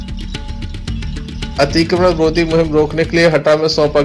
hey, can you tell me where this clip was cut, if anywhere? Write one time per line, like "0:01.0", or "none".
0:01.5